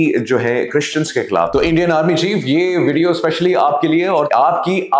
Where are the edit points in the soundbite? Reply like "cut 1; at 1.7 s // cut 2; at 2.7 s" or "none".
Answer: cut 1; at 1.5 s // cut 2; at 4.3 s